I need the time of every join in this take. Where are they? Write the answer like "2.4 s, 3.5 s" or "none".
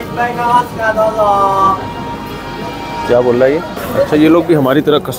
3.8 s